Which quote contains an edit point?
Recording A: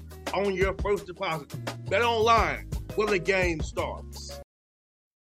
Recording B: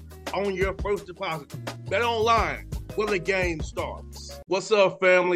A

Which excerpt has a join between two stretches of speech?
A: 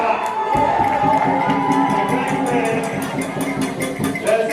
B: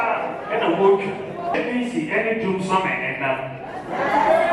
B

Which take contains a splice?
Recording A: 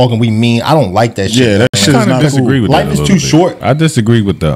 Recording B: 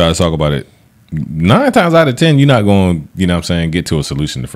A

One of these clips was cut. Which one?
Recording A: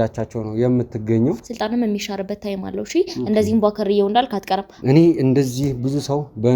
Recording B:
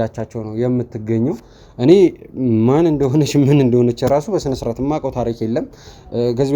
A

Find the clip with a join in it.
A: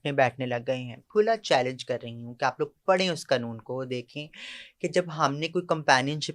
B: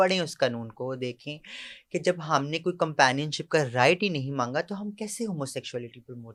A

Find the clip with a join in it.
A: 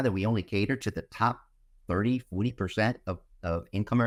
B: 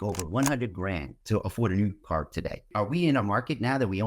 B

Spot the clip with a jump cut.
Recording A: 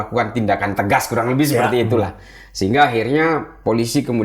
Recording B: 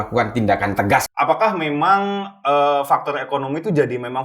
B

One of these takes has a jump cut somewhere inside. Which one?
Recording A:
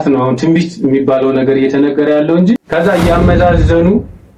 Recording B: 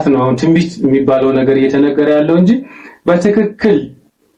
A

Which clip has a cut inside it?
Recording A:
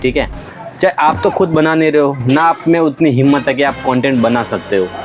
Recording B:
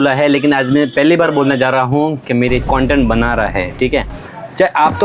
B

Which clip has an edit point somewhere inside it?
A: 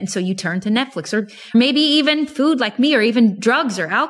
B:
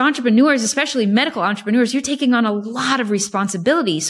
A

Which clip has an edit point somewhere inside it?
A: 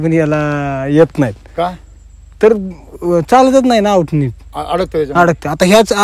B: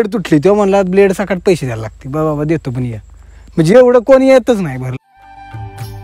B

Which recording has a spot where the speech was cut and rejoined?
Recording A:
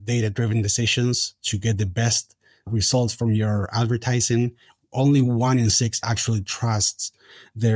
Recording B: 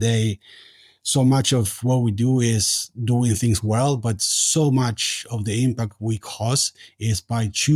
A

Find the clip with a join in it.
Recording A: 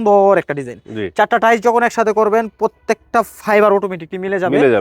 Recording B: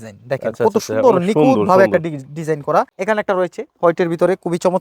B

